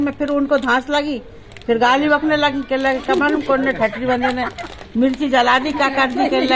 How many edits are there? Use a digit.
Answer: 0